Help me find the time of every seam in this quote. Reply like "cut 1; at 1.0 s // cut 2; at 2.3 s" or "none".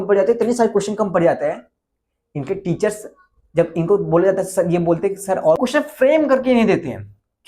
cut 1; at 5.6 s